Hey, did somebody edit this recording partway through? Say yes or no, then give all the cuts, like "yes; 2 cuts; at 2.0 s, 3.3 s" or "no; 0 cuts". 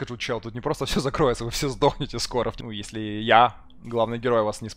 yes; 1 cut; at 2.6 s